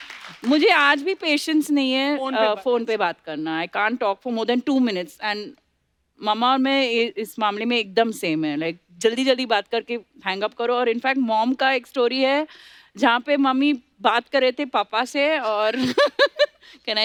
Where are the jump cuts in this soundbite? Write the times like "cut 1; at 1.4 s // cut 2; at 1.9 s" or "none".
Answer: none

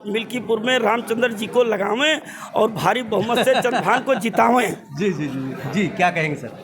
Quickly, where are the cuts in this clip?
none

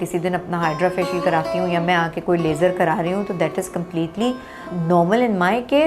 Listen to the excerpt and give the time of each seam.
cut 1; at 4.7 s

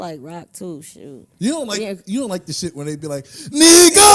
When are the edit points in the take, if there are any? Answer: cut 1; at 1.2 s

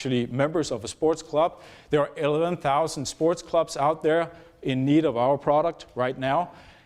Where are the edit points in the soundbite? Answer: none

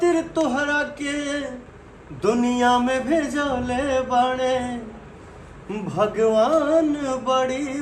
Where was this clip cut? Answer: none

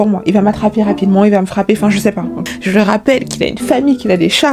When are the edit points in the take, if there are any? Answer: cut 1; at 2.3 s

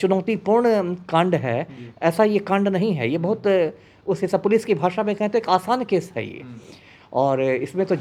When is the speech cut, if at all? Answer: none

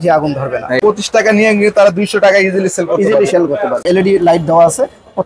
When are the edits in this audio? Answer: cut 1; at 0.8 s // cut 2; at 3.8 s

